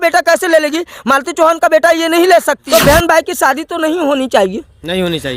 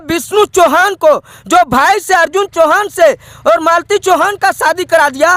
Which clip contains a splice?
first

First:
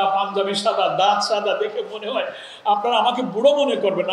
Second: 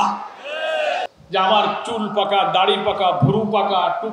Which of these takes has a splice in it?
second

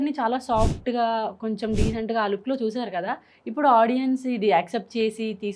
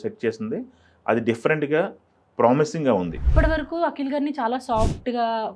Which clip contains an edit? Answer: second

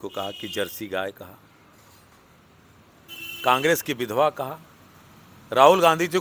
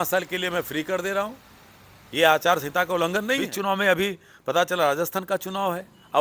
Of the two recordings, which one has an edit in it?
second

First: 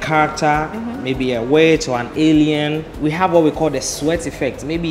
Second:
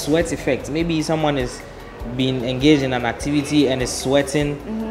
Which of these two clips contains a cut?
first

